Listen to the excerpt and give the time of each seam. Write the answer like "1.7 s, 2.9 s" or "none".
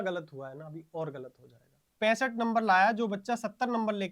1.8 s